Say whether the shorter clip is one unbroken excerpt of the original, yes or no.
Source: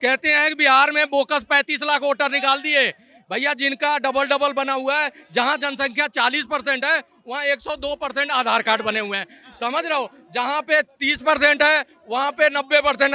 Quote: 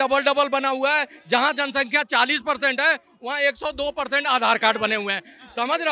yes